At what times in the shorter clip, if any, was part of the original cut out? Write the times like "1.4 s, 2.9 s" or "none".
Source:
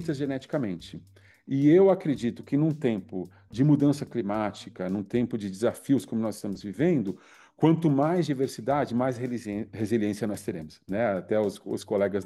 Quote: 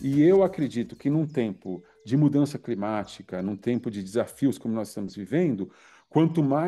none

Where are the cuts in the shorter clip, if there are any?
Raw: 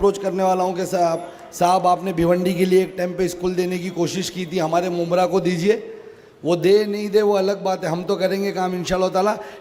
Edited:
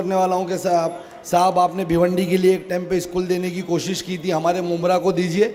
none

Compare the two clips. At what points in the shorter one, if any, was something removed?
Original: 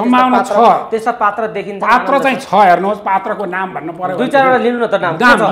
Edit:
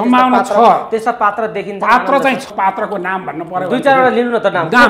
2.5 s

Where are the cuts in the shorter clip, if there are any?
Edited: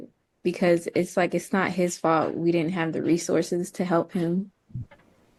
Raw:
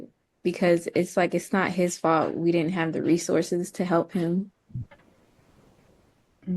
none

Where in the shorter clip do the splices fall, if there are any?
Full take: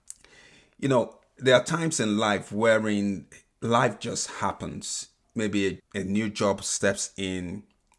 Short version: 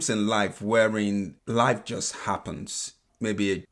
1.4 s

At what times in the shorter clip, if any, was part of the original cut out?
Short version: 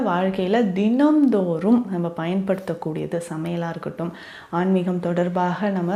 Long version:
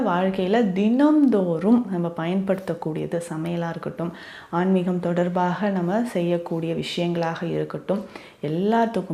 none

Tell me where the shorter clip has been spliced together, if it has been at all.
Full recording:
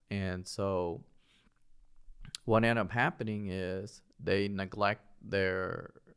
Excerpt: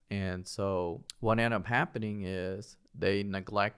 1.1 s

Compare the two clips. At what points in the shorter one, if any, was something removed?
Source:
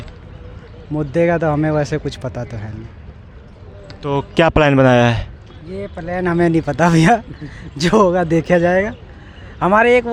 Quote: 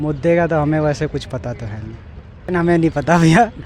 2.3 s

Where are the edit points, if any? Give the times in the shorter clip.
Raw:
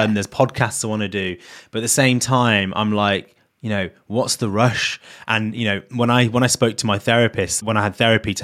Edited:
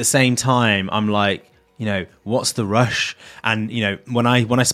none

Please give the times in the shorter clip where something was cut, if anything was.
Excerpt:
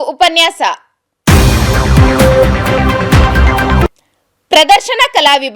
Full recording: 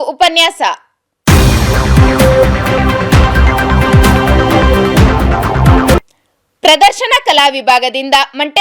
3.8 s

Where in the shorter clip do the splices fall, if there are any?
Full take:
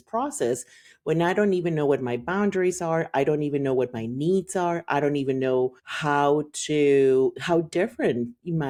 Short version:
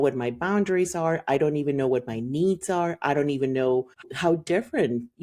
4.1 s

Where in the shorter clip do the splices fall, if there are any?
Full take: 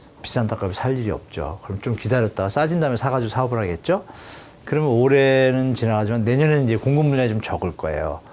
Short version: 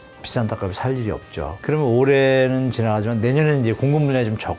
1.5 s

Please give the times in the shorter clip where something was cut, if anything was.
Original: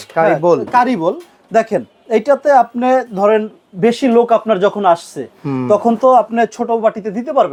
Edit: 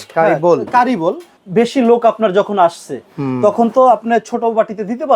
1.3 s

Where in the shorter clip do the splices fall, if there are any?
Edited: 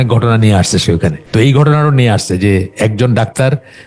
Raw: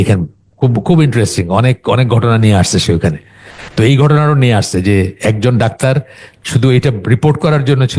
1.2 s

